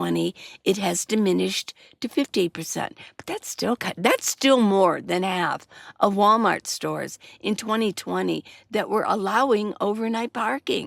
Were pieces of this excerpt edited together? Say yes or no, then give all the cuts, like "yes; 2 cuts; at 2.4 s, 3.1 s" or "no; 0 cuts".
no; 0 cuts